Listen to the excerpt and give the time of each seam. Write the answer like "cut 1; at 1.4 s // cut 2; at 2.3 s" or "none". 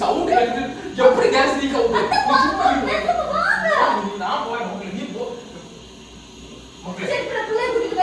none